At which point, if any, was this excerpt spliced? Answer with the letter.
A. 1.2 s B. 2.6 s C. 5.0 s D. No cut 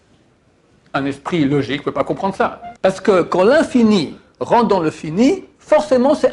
B